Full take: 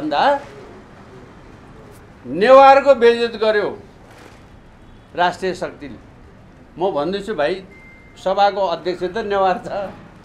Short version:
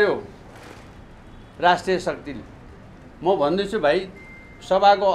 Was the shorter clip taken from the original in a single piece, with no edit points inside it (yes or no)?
yes